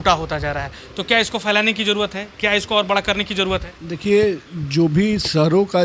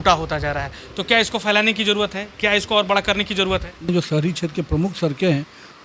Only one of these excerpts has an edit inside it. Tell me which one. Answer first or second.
second